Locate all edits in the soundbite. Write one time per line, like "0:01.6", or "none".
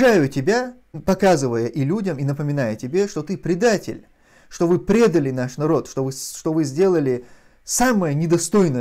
0:00.9